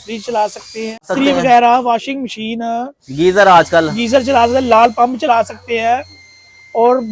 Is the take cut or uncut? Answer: cut